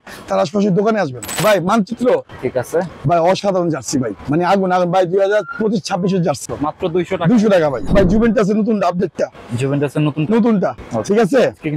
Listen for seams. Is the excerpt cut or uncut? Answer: cut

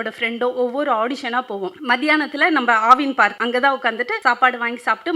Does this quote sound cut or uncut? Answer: cut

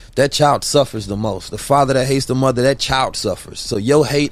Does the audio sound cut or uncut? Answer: uncut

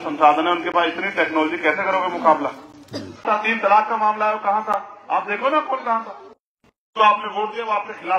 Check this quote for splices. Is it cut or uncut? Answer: cut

